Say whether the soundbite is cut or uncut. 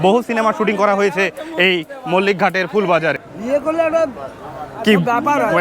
cut